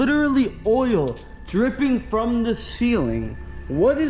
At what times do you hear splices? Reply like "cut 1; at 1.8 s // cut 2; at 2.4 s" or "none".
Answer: none